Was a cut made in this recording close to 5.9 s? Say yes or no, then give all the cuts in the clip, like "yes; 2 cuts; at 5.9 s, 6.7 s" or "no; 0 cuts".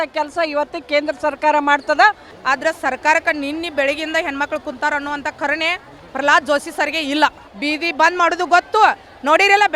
no; 2 cuts; at 2.3 s, 7.5 s